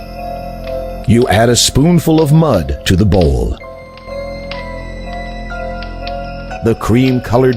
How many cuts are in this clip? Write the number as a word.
three